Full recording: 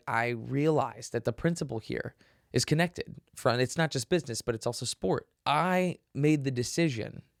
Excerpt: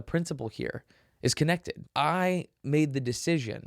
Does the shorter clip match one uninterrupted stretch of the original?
no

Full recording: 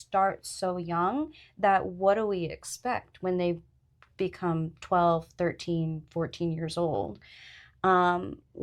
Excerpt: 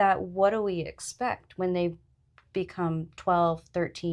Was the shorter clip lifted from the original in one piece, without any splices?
yes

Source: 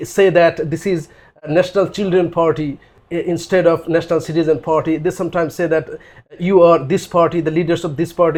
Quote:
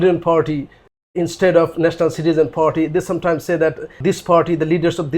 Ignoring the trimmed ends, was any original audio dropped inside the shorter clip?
yes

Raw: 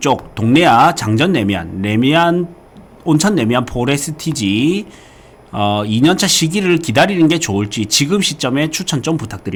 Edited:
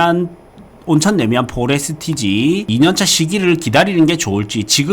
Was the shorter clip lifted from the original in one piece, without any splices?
no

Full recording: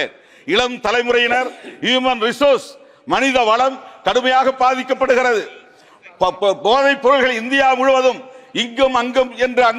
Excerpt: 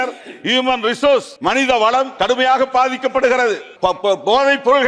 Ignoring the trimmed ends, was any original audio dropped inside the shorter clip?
yes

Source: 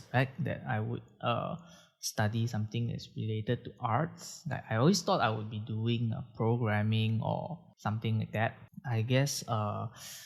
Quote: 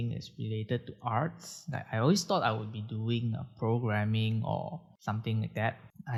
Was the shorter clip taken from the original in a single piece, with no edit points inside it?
yes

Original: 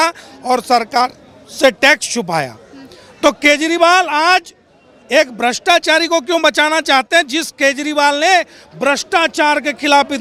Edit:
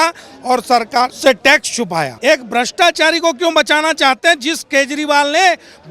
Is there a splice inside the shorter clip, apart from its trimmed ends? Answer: yes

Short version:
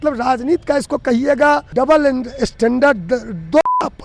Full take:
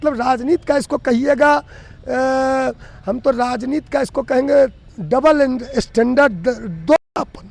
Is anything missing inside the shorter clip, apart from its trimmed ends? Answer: yes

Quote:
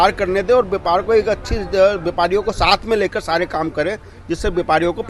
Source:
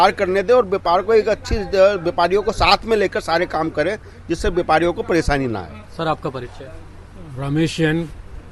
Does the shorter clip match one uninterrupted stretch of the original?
yes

